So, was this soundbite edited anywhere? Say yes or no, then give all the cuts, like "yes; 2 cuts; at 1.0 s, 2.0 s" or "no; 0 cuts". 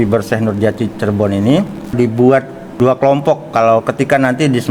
yes; 2 cuts; at 1.9 s, 2.6 s